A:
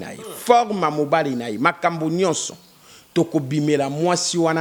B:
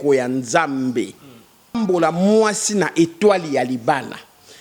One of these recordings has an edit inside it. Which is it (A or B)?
B